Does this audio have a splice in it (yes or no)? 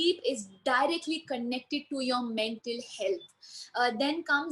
no